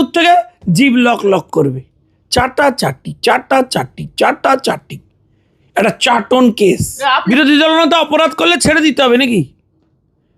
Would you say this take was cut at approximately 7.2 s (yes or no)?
yes